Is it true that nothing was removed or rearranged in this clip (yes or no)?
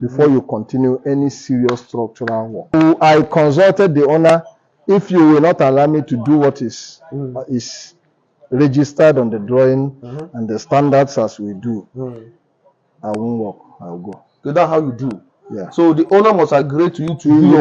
no